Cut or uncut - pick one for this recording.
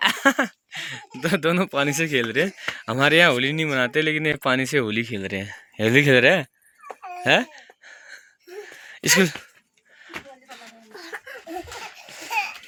uncut